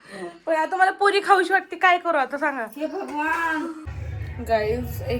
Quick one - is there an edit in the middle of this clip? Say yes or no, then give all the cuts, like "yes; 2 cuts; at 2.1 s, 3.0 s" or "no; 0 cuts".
yes; 1 cut; at 3.8 s